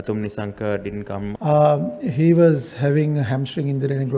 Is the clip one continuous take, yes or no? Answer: no